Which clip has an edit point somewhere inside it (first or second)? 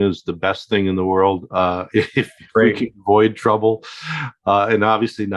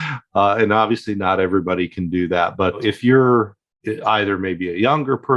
second